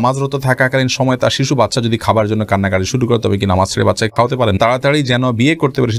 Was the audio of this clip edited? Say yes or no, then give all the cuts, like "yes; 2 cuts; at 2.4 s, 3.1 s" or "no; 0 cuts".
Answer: yes; 1 cut; at 4.5 s